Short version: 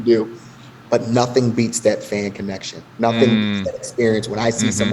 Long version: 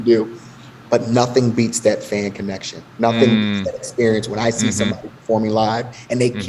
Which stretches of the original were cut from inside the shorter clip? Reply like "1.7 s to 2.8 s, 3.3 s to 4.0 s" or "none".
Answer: none